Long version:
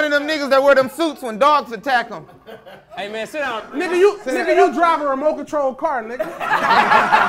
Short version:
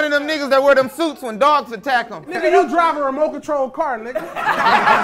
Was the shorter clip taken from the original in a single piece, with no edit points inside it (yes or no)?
no